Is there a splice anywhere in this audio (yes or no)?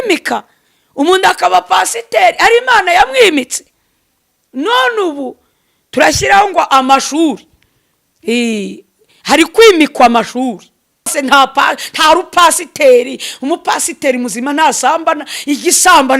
yes